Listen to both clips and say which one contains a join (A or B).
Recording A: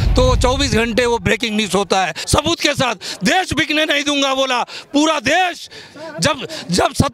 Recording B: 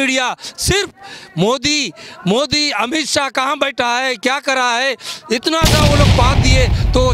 A